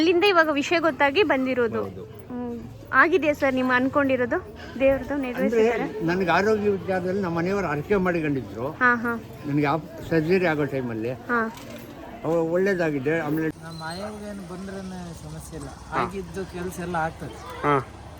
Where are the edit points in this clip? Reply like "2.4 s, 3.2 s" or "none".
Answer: 13.5 s